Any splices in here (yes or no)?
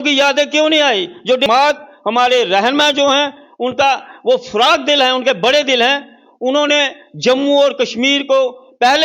yes